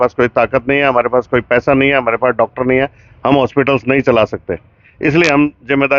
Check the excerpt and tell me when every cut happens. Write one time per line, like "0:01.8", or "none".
none